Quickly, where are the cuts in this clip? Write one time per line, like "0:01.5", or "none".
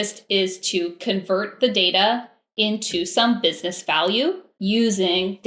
0:04.5